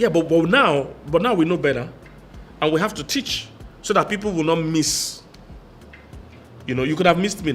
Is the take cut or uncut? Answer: uncut